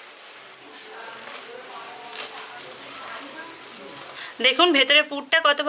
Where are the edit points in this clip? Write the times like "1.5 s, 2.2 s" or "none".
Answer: 4.2 s